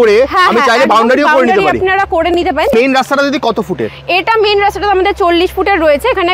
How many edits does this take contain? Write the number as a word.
one